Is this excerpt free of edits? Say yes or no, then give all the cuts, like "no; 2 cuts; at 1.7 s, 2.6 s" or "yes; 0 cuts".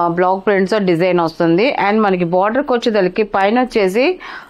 yes; 0 cuts